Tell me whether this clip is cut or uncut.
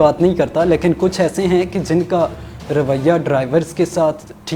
uncut